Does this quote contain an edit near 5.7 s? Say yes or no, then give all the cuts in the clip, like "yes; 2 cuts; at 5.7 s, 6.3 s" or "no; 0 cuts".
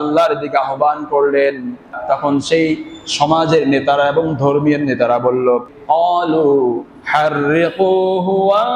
yes; 1 cut; at 5.7 s